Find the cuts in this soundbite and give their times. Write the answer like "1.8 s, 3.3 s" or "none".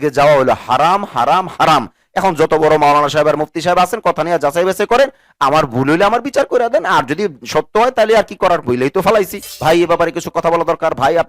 9.5 s